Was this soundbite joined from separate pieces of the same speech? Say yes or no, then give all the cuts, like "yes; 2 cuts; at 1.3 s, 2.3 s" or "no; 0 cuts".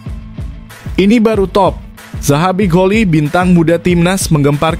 yes; 1 cut; at 0.9 s